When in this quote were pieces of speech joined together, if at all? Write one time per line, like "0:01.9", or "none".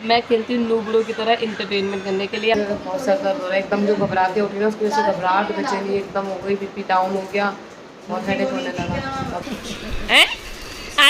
0:02.6
0:09.4